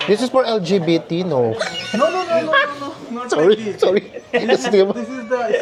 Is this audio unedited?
yes; 0 cuts

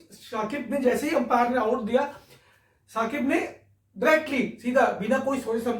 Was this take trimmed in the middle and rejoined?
no; 0 cuts

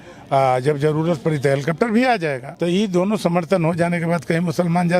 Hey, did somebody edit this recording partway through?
yes; 1 cut; at 2.5 s

